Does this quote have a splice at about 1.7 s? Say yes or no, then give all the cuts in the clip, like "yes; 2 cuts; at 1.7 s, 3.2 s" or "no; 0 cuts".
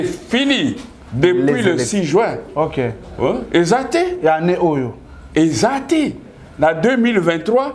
no; 0 cuts